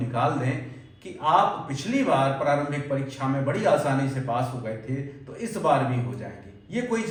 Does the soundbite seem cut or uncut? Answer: uncut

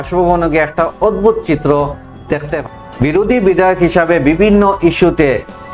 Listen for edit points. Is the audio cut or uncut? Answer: cut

